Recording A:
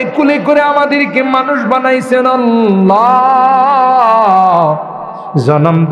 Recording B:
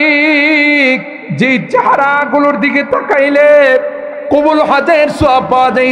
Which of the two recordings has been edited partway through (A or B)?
B